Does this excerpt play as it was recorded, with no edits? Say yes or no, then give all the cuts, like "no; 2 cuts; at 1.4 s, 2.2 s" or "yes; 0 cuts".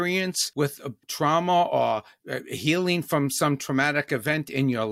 no; 1 cut; at 0.9 s